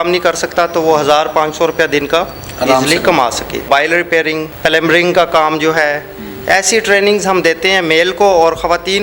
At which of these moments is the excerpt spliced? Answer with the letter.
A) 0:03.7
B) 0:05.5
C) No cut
A